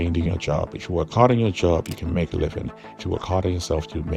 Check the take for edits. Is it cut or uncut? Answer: uncut